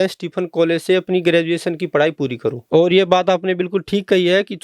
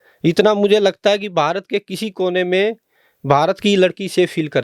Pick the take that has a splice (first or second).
first